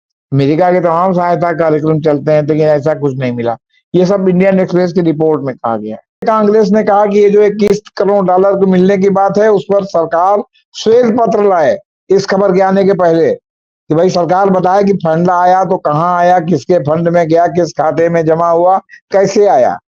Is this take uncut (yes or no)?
no